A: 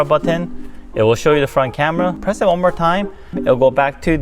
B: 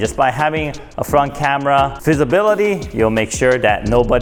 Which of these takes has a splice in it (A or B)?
A